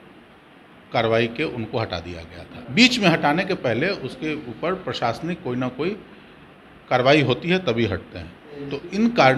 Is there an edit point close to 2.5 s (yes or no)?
yes